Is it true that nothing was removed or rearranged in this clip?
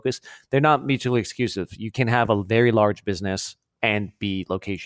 no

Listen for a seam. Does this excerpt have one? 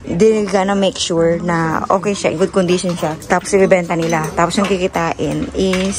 no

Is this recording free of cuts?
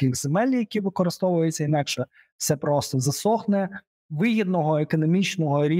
yes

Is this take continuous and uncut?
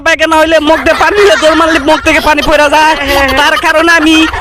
yes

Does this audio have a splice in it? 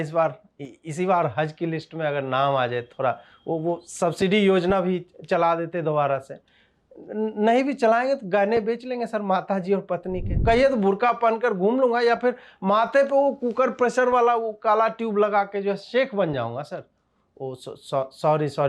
yes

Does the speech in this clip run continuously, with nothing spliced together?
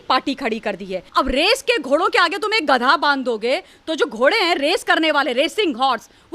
no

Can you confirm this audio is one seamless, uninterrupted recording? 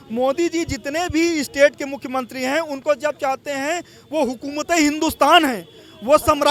yes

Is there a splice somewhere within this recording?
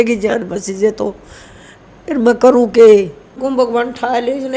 yes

